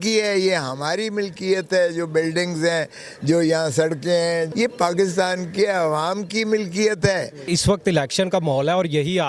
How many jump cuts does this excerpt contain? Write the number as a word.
two